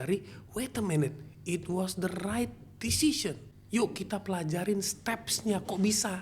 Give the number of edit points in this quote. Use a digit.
1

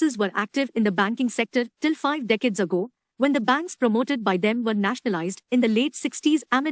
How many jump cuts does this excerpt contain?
1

